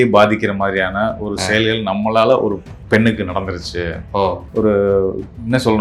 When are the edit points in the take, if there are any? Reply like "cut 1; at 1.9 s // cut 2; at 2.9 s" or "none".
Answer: cut 1; at 4.4 s